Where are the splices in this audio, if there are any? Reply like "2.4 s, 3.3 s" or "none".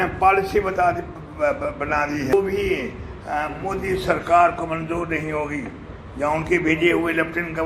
2.3 s